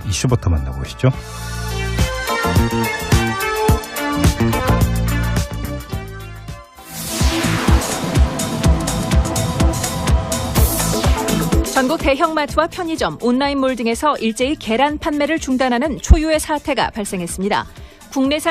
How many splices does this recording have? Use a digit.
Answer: 1